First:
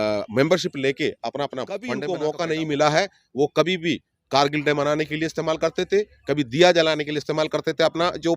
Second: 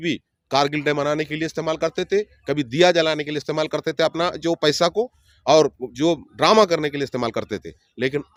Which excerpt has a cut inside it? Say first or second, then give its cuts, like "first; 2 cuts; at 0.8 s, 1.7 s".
first; 1 cut; at 2.0 s